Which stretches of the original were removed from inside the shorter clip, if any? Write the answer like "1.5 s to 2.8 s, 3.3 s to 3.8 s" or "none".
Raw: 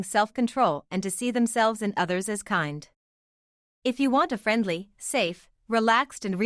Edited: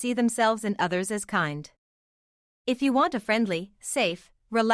none